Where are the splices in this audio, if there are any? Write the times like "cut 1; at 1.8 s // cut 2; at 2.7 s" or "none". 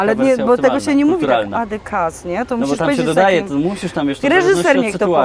none